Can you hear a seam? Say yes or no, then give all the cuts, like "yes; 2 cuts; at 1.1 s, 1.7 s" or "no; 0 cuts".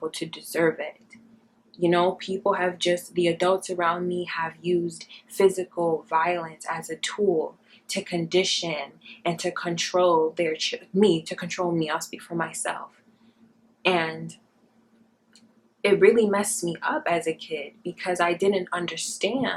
no; 0 cuts